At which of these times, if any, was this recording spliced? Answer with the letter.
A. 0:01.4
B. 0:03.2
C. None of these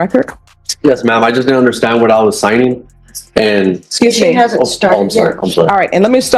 C